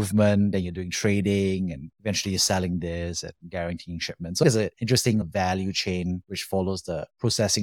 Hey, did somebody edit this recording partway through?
yes; 1 cut; at 4.4 s

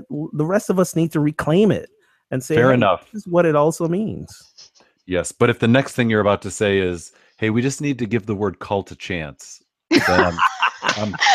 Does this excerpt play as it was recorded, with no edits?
yes; 0 cuts

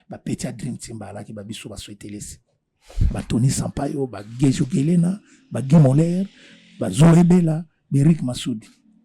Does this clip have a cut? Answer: no; 0 cuts

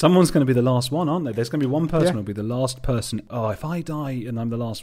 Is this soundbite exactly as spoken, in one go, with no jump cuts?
no; 1 cut; at 3.3 s

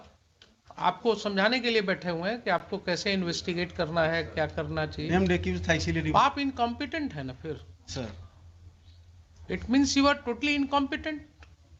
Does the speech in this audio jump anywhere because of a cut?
no; 0 cuts

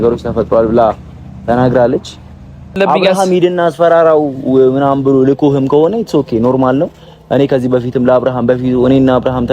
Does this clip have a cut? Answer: yes; 1 cut; at 2.8 s

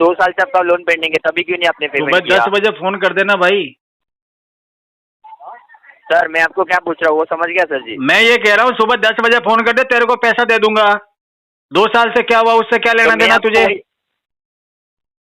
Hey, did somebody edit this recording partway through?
no; 0 cuts

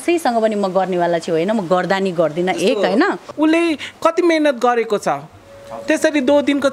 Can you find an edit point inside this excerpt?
yes; 1 cut; at 3.3 s

